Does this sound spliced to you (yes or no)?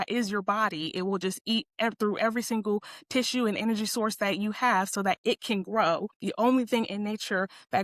yes